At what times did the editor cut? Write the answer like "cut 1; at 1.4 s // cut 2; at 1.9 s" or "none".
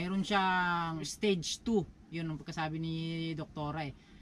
cut 1; at 1.1 s